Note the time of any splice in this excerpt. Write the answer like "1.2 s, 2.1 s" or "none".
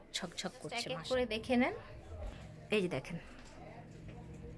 1.0 s